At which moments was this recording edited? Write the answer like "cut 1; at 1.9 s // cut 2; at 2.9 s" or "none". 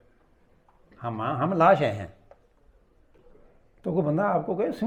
none